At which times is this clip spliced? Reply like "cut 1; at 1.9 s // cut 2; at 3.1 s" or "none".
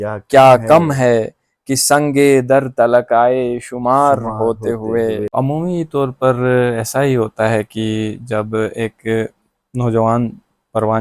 cut 1; at 5.3 s